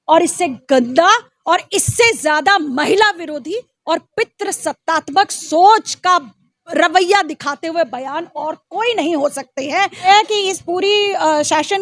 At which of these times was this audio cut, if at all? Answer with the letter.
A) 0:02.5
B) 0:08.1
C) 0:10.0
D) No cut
C